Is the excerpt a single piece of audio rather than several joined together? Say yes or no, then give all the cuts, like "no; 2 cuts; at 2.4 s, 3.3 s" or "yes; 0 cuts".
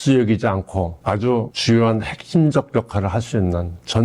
no; 1 cut; at 0.9 s